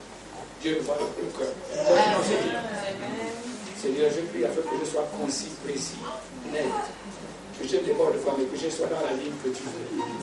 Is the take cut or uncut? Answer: uncut